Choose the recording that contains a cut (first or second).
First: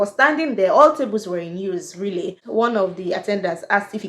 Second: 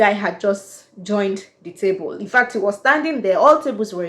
first